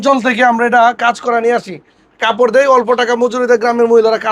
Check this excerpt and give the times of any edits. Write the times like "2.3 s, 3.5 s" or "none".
none